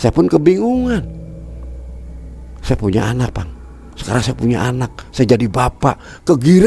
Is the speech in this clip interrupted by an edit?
yes; 2 cuts; at 1.0 s, 2.6 s

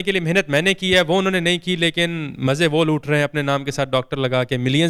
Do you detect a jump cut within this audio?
no; 0 cuts

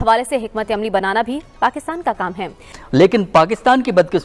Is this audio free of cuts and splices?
no; 1 cut; at 2.7 s

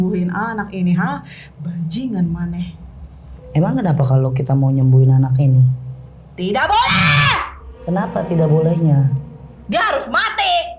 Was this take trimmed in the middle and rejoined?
no; 0 cuts

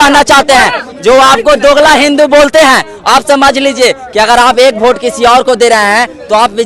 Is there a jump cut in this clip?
no; 0 cuts

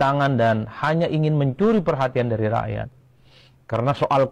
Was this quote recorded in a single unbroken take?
yes; 0 cuts

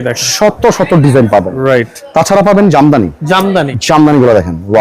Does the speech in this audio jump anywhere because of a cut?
yes; 2 cuts; at 2.0 s, 3.7 s

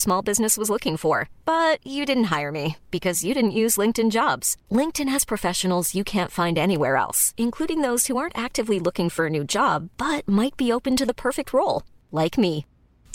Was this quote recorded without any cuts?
yes; 0 cuts

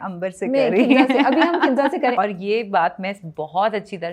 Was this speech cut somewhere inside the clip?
yes; 1 cut; at 2.1 s

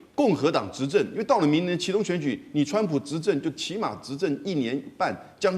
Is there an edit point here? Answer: no; 0 cuts

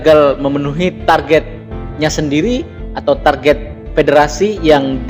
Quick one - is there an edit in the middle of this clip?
no; 0 cuts

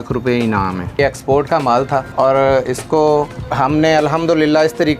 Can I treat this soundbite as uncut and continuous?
no; 3 cuts; at 1.0 s, 2.1 s, 3.4 s

